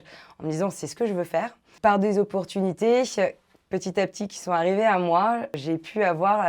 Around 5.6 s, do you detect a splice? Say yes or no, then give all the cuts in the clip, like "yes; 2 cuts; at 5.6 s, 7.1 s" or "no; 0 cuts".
yes; 2 cuts; at 1.7 s, 5.6 s